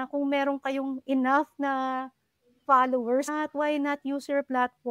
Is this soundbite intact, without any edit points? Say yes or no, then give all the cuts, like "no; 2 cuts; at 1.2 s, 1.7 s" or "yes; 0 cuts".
no; 1 cut; at 3.3 s